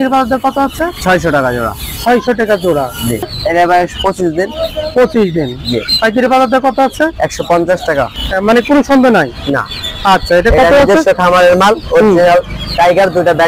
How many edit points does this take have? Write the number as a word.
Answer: two